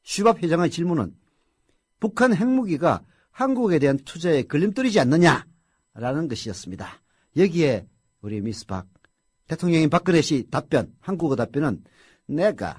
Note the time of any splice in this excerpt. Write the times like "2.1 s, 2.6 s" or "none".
7.8 s